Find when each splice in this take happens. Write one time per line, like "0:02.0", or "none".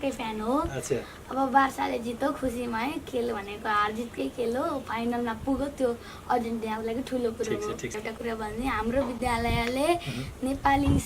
0:07.9

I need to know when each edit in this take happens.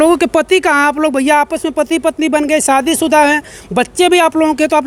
none

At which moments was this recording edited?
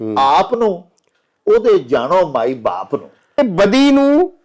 0:03.4

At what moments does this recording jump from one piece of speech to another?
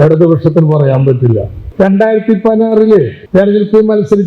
0:01.6
0:03.2

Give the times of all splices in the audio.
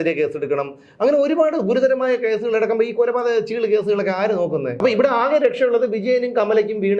0:04.8

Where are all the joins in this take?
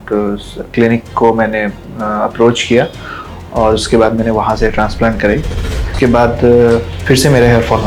0:05.9
0:06.9

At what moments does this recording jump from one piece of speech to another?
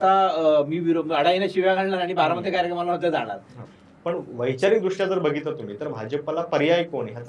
0:03.5

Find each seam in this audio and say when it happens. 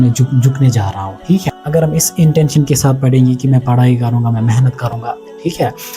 0:01.5

